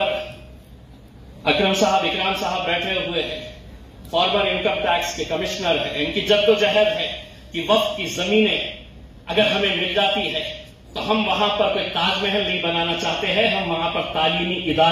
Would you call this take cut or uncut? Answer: uncut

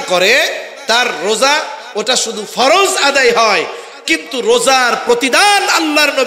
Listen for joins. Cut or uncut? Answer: uncut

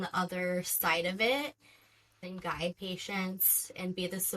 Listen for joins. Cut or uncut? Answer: cut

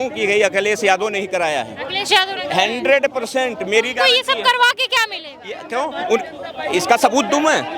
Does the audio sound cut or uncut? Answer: uncut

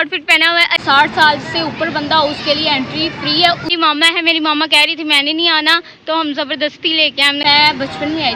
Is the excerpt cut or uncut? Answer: cut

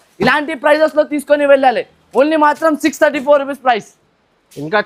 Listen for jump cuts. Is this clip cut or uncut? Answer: uncut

